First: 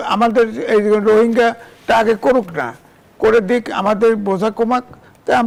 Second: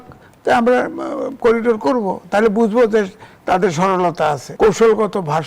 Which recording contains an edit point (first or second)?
second